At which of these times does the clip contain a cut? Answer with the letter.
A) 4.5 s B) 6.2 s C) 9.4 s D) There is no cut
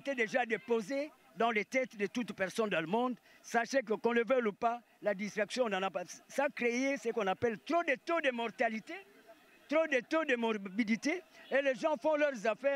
D